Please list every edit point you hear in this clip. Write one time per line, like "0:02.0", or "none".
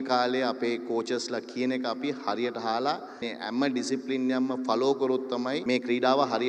0:03.3
0:05.6